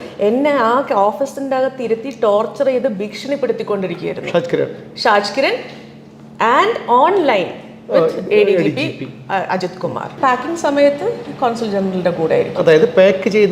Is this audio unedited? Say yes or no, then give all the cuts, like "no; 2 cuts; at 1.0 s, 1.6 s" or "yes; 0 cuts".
no; 1 cut; at 10.1 s